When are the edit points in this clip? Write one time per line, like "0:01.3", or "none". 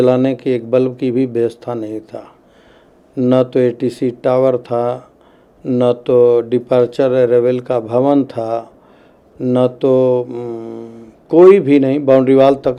none